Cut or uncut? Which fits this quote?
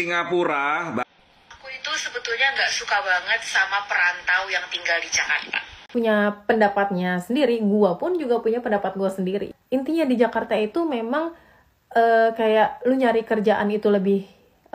cut